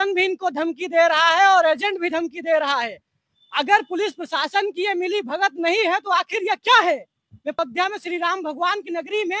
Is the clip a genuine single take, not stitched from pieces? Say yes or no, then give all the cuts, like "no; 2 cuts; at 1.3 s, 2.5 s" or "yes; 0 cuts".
no; 1 cut; at 7.6 s